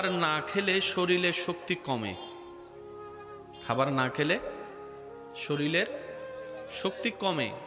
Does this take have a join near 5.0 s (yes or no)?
no